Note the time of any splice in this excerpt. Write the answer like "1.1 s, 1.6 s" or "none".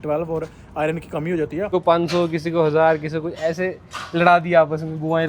1.7 s